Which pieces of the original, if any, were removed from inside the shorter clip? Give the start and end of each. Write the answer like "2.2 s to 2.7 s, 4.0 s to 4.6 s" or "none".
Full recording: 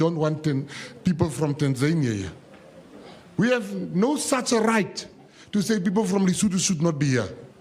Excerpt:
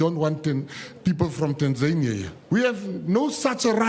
2.3 s to 3.2 s